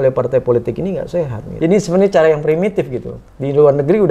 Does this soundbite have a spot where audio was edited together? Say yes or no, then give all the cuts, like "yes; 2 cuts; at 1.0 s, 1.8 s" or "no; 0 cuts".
yes; 1 cut; at 1.4 s